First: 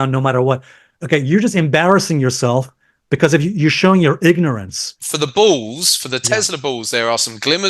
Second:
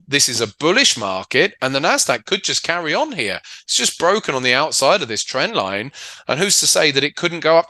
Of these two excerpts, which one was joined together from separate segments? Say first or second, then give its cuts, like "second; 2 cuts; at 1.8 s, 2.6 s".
first; 1 cut; at 5.1 s